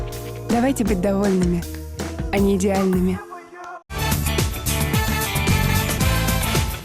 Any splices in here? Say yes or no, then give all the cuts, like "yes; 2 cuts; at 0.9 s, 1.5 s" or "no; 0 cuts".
yes; 1 cut; at 4.0 s